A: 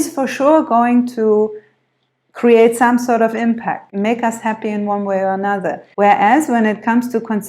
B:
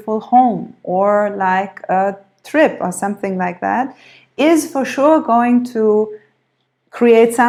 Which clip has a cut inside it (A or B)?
A